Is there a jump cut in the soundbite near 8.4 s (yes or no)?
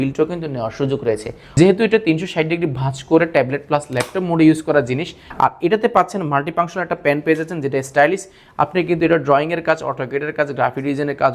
no